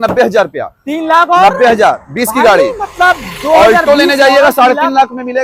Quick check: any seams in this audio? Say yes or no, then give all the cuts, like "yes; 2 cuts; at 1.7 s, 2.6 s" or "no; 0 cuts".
no; 0 cuts